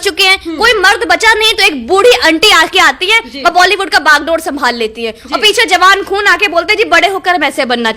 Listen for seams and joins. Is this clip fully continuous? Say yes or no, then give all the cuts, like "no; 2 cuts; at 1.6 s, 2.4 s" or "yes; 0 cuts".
yes; 0 cuts